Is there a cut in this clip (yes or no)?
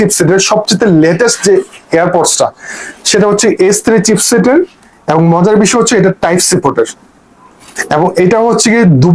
no